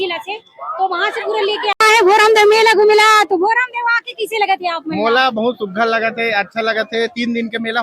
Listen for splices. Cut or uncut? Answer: cut